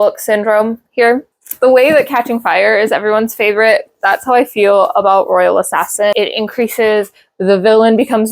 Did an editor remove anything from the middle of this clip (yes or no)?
yes